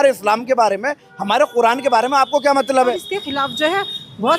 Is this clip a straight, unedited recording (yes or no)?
no